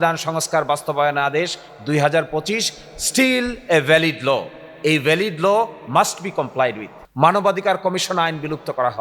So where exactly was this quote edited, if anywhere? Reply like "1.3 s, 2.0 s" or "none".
7.0 s